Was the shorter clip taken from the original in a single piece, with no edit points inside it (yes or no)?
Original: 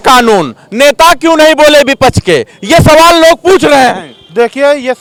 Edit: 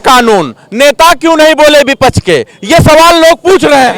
yes